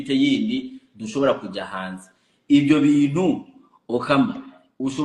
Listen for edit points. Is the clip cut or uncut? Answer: uncut